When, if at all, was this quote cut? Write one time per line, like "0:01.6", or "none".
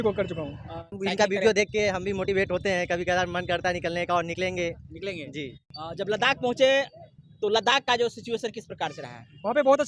0:01.0
0:05.7